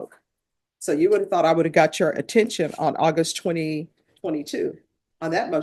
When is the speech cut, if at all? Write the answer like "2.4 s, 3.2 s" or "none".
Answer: none